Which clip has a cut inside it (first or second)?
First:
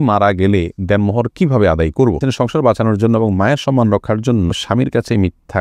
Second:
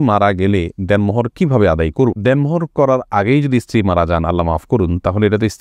first